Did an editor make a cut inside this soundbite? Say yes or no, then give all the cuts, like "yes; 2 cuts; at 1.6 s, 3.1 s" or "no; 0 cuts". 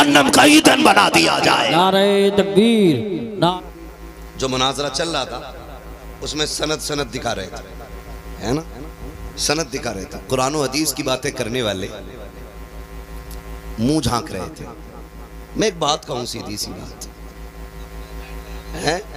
yes; 1 cut; at 3.6 s